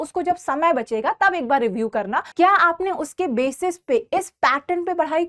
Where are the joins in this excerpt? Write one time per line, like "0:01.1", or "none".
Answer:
0:02.3